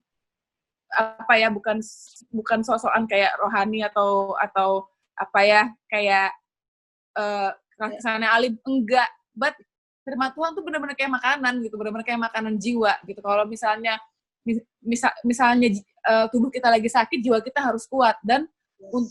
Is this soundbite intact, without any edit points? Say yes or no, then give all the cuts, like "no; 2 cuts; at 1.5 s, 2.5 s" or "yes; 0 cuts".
yes; 0 cuts